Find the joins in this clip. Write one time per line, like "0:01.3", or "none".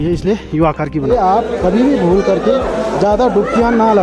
0:01.1